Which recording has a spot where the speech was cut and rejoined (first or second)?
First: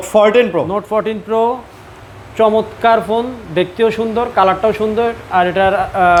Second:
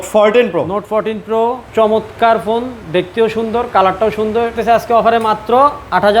second